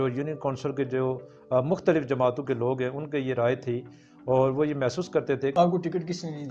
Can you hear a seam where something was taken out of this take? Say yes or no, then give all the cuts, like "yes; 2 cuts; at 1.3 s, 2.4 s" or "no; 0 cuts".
yes; 1 cut; at 5.5 s